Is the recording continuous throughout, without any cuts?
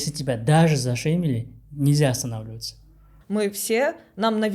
no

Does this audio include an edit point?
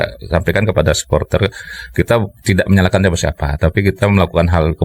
no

